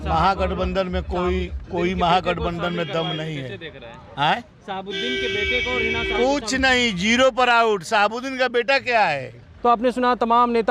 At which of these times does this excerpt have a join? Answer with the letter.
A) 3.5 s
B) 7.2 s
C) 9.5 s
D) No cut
D